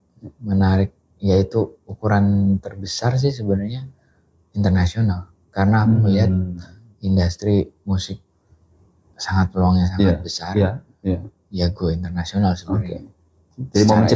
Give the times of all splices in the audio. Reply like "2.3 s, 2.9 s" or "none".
none